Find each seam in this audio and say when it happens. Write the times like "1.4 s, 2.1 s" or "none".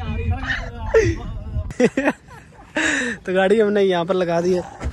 1.7 s